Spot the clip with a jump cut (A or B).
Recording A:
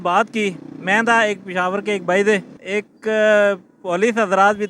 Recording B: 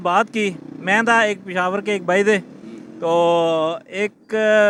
A